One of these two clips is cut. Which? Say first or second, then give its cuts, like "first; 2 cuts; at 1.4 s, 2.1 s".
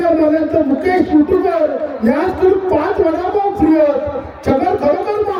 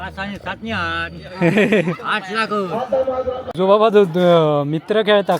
second; 1 cut; at 3.5 s